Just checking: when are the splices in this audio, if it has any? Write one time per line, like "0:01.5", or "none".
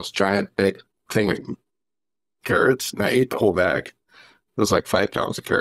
none